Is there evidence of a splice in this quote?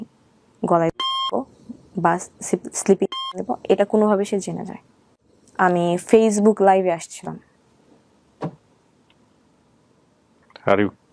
no; 0 cuts

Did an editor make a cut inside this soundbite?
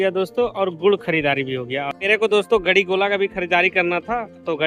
yes; 1 cut; at 1.9 s

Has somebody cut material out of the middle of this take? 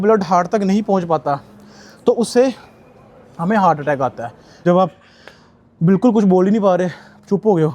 yes; 1 cut; at 4.3 s

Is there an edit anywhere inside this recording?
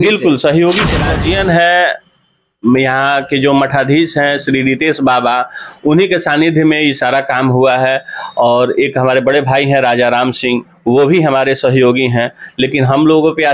yes; 1 cut; at 1.0 s

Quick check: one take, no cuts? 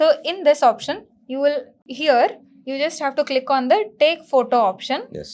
no; 1 cut; at 1.8 s

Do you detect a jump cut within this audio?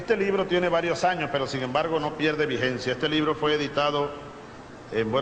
no; 0 cuts

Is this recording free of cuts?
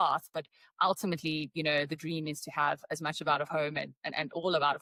yes; 0 cuts

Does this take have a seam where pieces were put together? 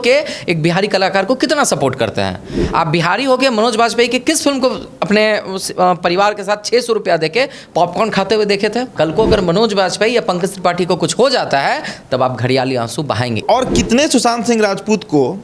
yes; 2 cuts; at 8.9 s, 13.4 s

